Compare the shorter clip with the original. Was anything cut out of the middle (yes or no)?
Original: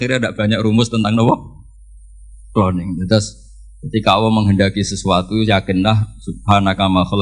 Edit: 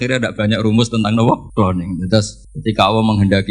yes